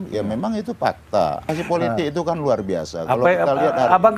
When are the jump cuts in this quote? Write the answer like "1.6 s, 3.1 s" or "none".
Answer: 1.5 s